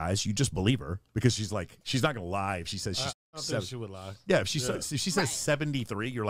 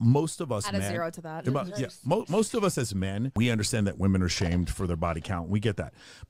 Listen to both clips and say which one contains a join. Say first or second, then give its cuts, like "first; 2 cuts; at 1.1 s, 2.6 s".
second; 1 cut; at 3.3 s